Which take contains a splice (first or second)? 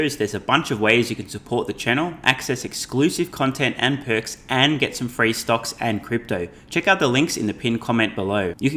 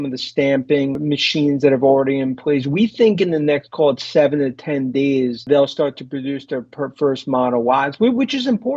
second